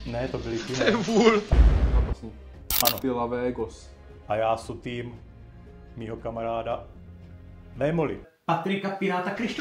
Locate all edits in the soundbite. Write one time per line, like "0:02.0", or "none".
0:01.5
0:08.3